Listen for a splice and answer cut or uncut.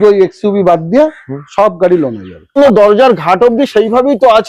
cut